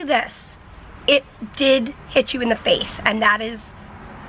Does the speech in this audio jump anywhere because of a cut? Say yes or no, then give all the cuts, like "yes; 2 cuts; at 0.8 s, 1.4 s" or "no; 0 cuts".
no; 0 cuts